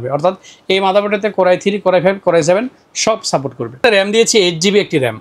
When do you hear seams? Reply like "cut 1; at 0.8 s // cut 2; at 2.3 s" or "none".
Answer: cut 1; at 3.8 s